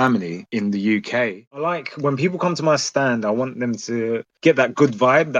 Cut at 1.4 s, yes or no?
yes